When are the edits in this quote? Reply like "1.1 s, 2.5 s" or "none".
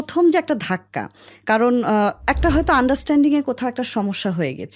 none

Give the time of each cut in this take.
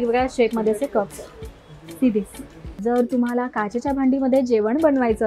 2.8 s

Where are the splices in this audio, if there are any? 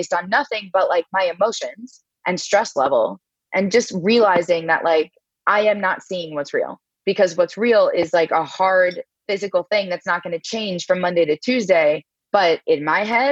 3.4 s, 9.2 s

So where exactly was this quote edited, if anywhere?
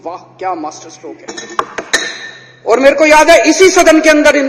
none

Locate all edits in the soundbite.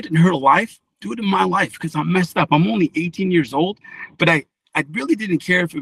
none

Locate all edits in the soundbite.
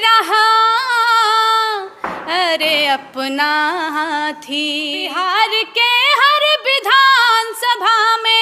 5.0 s

